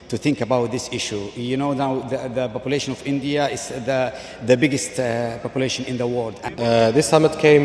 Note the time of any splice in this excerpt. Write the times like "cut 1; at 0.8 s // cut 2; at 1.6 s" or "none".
cut 1; at 6.4 s

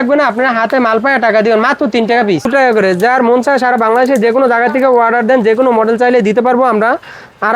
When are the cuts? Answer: cut 1; at 2.4 s

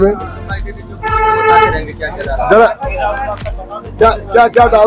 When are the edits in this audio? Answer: none

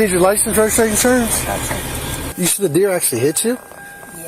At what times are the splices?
cut 1; at 2.3 s

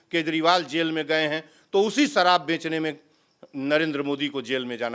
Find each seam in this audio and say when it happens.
none

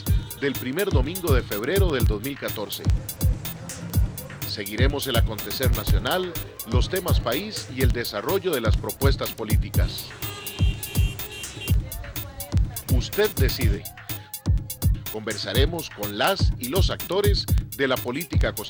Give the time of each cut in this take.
none

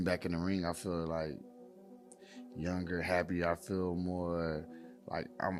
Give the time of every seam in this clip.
none

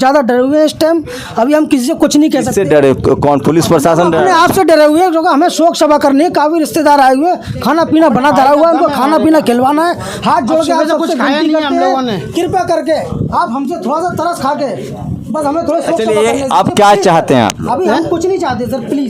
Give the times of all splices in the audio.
none

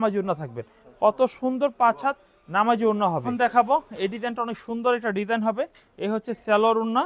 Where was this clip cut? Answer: cut 1; at 3.2 s

